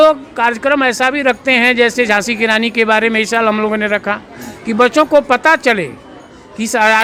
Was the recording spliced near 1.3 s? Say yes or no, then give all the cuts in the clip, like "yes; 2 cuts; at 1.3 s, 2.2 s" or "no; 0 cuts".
no; 0 cuts